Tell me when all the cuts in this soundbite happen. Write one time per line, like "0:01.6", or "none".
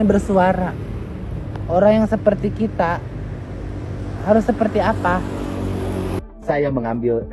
0:06.2